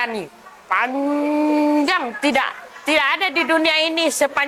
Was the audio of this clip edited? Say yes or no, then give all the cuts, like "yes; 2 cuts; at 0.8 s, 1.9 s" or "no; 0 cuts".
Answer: no; 0 cuts